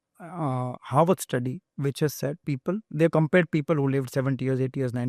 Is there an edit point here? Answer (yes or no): no